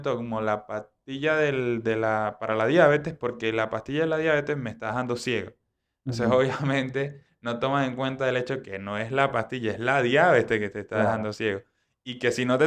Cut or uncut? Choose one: uncut